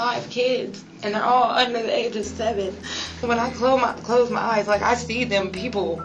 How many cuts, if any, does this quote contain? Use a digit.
1